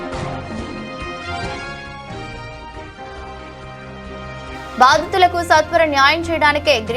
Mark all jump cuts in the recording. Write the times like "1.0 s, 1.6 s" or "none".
3.8 s